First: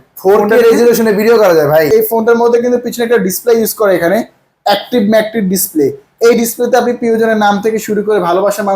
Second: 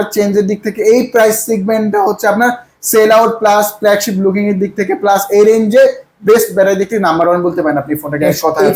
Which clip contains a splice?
first; 1 cut; at 1.9 s

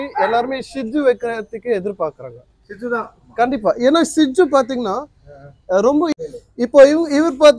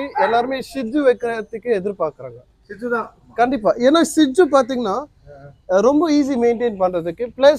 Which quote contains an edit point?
first; 1 cut; at 6.1 s

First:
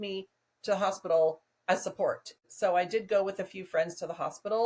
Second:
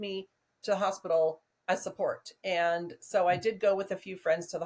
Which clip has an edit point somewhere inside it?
first; 1 cut; at 2.4 s

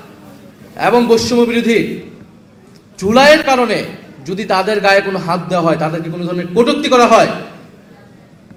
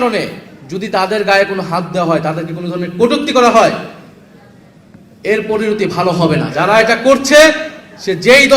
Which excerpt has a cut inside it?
second; 1 cut; at 6.5 s

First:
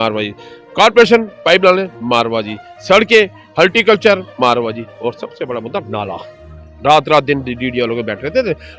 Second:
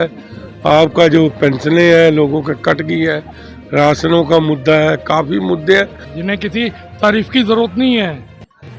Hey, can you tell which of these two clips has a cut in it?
second; 1 cut; at 6.1 s

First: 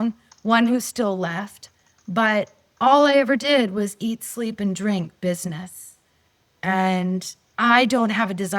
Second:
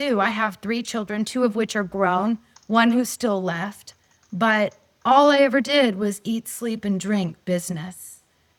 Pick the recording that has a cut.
first; 1 cut; at 7.4 s

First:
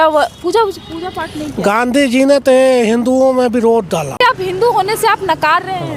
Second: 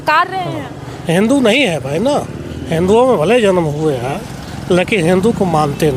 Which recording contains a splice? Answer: first; 1 cut; at 4.2 s

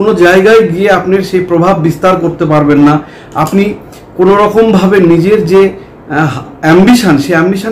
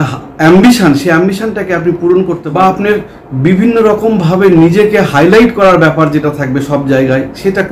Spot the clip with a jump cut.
second; 1 cut; at 2.4 s

